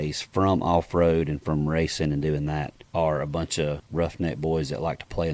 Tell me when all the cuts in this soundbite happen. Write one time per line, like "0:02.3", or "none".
0:02.8
0:03.8

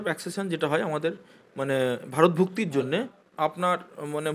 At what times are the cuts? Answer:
0:03.2

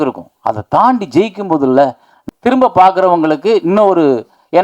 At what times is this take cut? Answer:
0:02.1

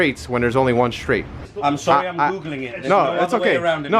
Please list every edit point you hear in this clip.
0:01.4

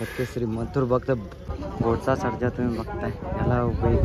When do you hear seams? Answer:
0:01.8

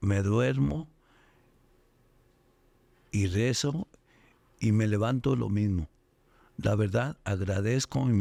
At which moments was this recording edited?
none

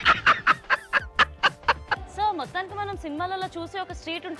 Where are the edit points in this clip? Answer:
0:02.1

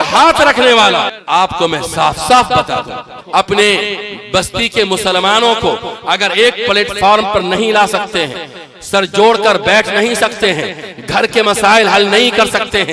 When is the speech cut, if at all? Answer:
0:01.2
0:03.1

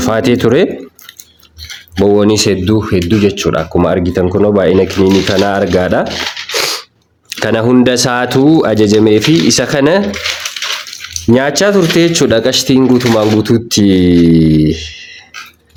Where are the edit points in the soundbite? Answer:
none

